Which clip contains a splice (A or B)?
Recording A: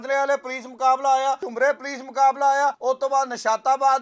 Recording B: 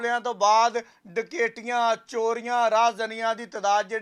A